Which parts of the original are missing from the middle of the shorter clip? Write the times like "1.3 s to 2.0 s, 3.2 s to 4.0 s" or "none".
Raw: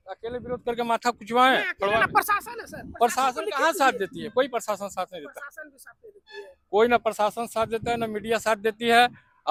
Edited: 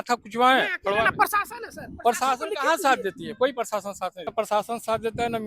5.3 s to 7.0 s

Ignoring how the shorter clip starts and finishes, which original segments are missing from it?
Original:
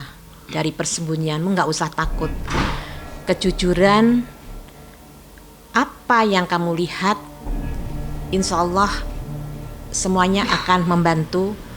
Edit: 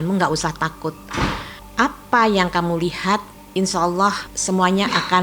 2.9 s to 5.5 s, 7.3 s to 8.1 s, 9.1 s to 9.9 s

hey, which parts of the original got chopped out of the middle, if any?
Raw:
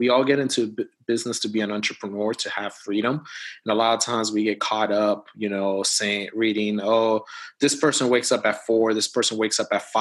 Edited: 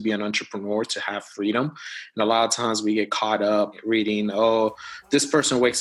5.3 s to 6.3 s

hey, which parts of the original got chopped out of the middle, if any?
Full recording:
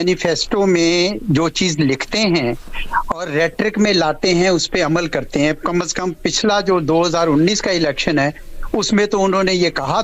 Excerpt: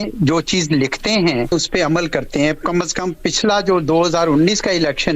2.6 s to 4.5 s

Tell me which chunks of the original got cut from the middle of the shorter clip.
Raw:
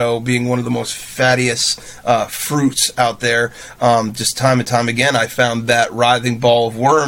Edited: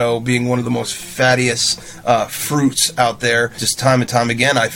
3.6 s to 4.2 s

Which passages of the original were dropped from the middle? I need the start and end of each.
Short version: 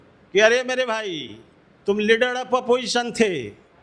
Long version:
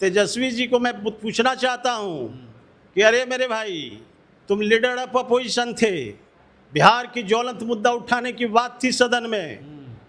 none

